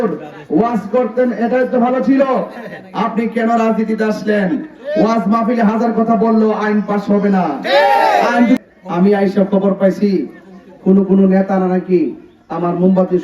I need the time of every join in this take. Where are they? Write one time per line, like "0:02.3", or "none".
0:08.6